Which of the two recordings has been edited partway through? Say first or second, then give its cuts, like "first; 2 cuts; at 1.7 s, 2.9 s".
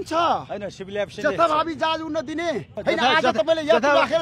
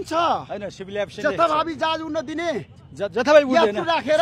first; 1 cut; at 2.7 s